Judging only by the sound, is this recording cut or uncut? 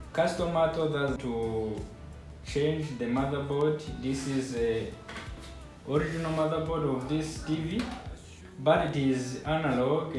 cut